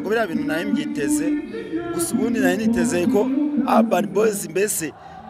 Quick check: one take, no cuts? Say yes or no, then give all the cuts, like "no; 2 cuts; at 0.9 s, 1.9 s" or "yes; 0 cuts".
yes; 0 cuts